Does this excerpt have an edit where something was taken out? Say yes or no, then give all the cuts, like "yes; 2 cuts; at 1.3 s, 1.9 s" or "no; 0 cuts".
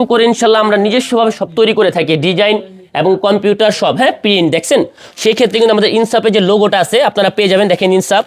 yes; 1 cut; at 5.1 s